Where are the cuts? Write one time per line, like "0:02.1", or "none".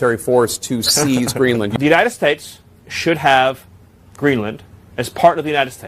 0:01.7